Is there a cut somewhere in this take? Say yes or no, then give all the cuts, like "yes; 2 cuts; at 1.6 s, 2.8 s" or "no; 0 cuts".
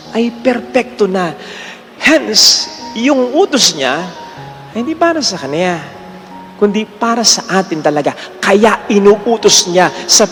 no; 0 cuts